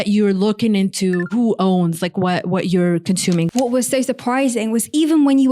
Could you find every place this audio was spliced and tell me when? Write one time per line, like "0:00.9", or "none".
0:01.3
0:03.5